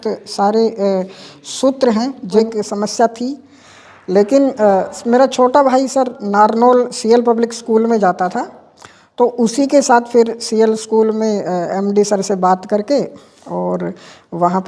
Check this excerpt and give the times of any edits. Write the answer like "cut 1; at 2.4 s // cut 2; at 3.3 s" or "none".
cut 1; at 2.4 s